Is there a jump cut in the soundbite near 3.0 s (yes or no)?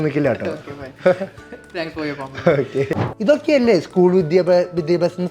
yes